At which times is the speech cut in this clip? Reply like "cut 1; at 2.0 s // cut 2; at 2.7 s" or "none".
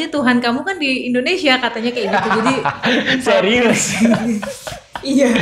none